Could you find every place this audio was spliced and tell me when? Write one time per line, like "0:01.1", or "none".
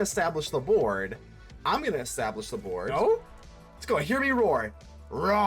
0:02.9